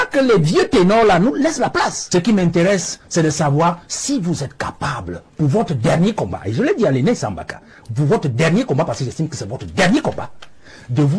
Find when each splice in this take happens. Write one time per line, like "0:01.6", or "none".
0:02.0